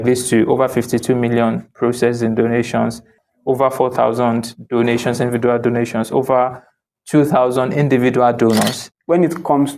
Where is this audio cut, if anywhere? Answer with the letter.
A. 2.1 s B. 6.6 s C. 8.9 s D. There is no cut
C